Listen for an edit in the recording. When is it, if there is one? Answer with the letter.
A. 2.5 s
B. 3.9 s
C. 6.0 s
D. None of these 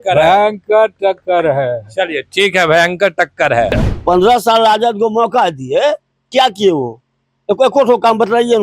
B